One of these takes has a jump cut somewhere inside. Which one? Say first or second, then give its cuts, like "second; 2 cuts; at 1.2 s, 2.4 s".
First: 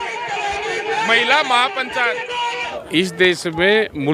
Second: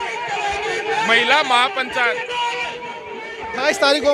first; 1 cut; at 2.8 s